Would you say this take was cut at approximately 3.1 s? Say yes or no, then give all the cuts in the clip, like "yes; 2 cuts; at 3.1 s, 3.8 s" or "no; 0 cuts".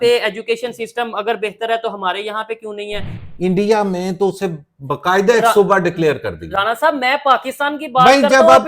yes; 1 cut; at 3.1 s